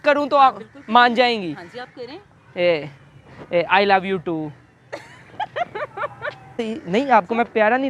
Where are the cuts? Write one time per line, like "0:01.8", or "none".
0:06.5